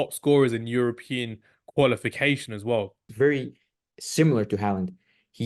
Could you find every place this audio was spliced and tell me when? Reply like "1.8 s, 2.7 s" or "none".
3.0 s